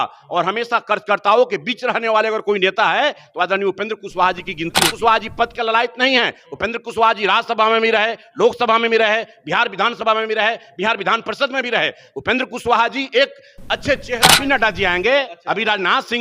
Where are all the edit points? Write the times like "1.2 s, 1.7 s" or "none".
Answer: 4.9 s, 14.3 s